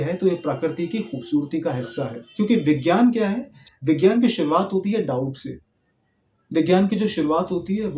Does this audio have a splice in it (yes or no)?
yes